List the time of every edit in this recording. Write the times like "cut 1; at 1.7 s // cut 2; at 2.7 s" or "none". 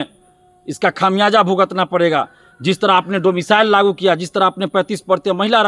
none